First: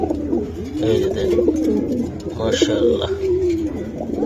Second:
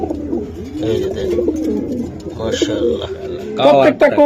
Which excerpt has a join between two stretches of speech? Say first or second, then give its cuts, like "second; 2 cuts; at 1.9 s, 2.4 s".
second; 1 cut; at 3.2 s